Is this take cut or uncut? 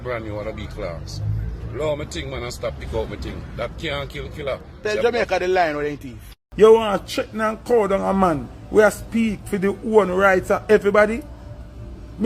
cut